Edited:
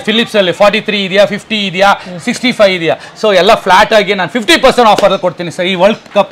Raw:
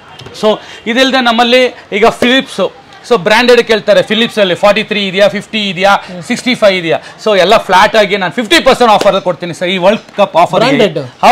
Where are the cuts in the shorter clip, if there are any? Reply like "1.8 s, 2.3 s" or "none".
none